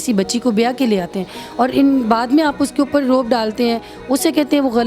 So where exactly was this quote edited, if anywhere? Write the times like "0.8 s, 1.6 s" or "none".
none